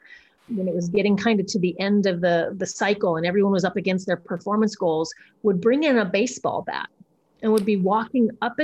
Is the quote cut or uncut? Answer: uncut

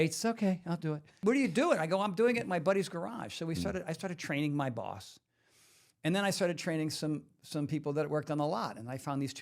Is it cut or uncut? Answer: cut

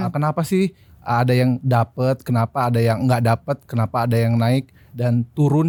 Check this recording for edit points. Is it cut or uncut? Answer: uncut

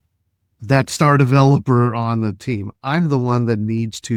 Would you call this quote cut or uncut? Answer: uncut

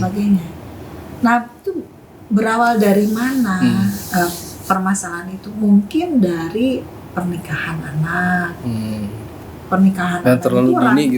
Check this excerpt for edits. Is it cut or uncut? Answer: uncut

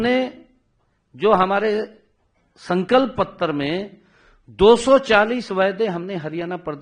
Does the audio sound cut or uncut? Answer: uncut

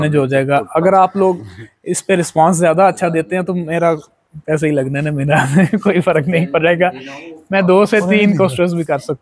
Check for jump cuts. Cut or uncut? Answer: uncut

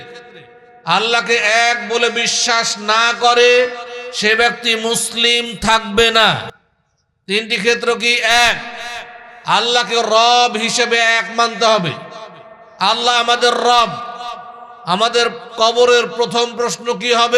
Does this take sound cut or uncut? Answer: uncut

